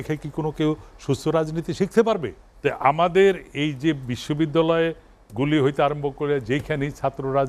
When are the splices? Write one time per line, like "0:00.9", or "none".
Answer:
0:02.4